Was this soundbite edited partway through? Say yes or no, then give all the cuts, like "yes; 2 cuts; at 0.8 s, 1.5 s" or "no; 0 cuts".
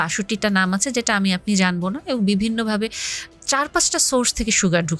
no; 0 cuts